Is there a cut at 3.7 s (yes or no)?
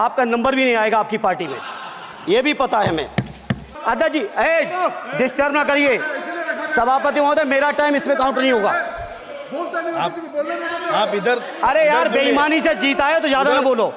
yes